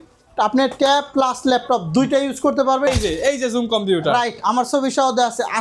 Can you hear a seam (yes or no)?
yes